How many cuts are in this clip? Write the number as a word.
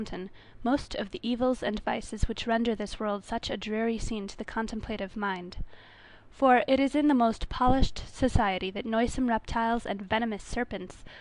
one